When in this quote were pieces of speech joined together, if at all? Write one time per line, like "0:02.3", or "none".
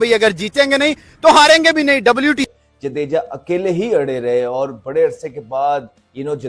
0:02.6